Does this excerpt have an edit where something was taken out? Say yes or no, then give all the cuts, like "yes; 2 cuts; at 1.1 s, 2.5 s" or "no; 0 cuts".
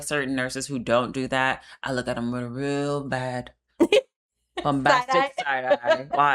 no; 0 cuts